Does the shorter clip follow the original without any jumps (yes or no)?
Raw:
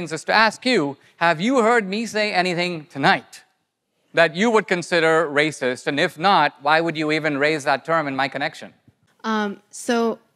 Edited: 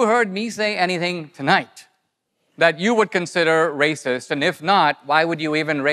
yes